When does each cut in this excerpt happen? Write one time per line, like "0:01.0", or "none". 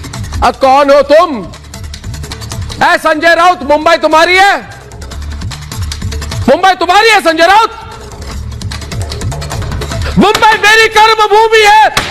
none